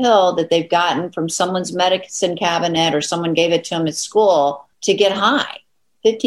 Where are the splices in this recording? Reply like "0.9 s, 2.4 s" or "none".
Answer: 4.7 s